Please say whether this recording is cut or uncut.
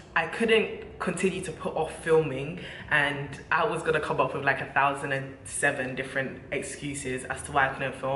uncut